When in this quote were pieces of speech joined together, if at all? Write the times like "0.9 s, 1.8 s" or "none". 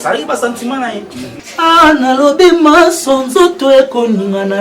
1.4 s